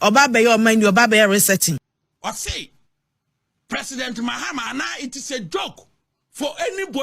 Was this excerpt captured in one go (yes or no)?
no